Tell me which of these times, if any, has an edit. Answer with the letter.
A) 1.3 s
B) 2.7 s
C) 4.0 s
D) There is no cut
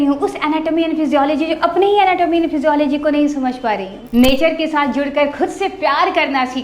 C